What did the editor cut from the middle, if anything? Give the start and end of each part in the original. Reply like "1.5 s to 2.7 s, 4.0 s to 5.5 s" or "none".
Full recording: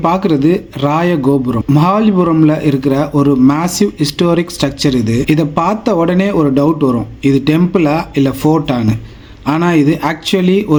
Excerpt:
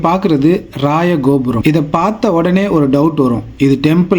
1.6 s to 5.2 s